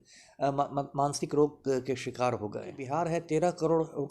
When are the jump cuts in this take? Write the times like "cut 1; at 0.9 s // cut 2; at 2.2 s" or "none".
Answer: cut 1; at 2.8 s